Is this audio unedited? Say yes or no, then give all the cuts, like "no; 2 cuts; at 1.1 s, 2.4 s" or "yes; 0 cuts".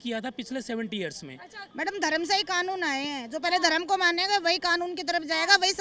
no; 1 cut; at 1.6 s